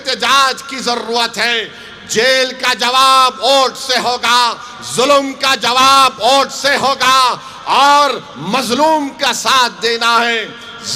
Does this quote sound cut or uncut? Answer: uncut